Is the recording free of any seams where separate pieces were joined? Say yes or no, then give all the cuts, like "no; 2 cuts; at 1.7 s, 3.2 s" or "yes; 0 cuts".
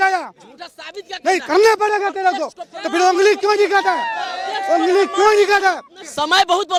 yes; 0 cuts